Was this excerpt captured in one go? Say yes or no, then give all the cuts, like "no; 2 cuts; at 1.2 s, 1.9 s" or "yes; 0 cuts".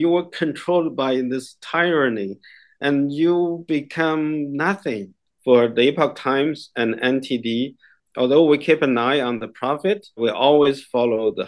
no; 3 cuts; at 5.3 s, 7.9 s, 10.2 s